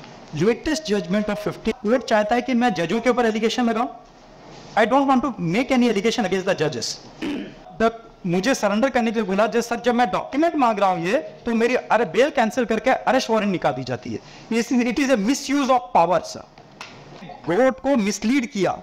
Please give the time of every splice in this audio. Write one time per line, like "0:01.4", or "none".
0:01.7
0:07.6
0:17.3